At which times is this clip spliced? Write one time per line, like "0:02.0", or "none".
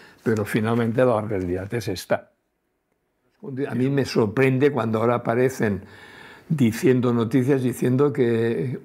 0:03.6

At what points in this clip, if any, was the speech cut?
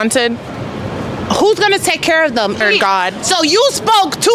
0:02.6

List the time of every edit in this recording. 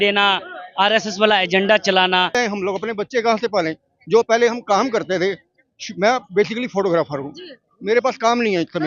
0:02.3

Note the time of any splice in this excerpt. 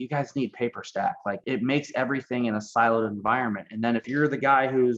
0:01.4
0:04.1

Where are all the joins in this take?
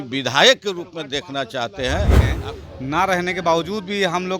0:02.3

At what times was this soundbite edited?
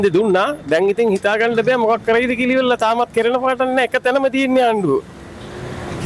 none

